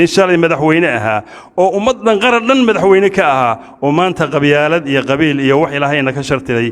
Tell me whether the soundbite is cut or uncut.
uncut